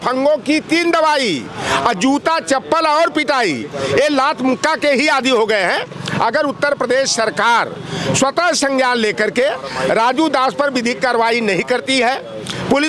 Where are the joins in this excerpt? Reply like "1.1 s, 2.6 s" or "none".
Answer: none

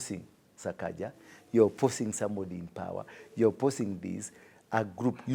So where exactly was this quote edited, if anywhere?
none

